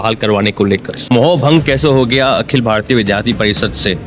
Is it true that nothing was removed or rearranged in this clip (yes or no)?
no